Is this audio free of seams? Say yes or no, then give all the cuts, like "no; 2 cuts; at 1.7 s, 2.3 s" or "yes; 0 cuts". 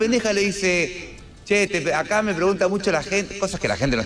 yes; 0 cuts